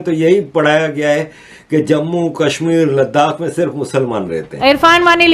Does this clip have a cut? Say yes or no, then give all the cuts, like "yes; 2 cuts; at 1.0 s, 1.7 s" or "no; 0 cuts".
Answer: yes; 1 cut; at 4.4 s